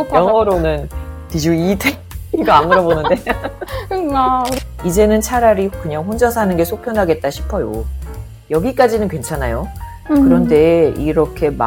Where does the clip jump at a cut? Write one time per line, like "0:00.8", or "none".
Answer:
0:04.6